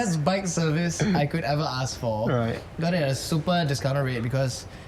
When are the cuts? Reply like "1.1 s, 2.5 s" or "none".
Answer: none